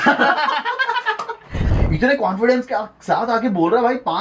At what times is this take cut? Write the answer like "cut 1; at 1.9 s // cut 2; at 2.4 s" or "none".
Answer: cut 1; at 1.7 s